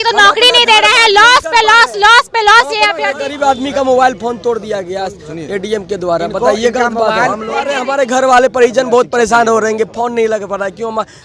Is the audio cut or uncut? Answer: cut